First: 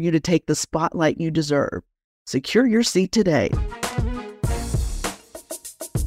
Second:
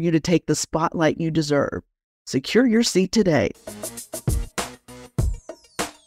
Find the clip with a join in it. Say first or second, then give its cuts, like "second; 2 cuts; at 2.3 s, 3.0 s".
first; 2 cuts; at 3.5 s, 5.2 s